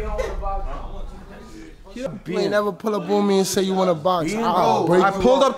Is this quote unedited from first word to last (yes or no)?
no